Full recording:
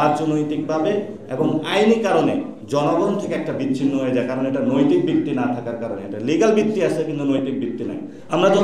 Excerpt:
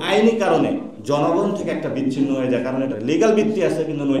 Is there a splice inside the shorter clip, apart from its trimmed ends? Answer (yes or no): yes